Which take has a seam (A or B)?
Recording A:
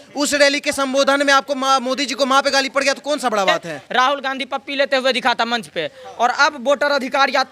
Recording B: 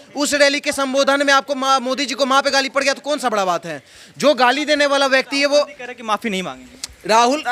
A